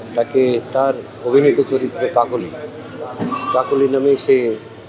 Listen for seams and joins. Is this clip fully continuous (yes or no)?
yes